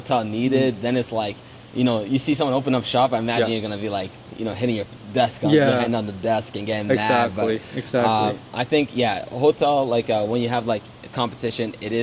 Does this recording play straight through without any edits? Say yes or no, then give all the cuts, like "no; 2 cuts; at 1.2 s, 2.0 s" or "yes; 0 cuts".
yes; 0 cuts